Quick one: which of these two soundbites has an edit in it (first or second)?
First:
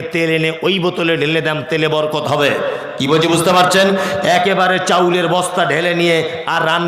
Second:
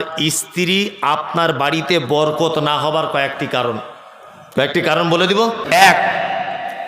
second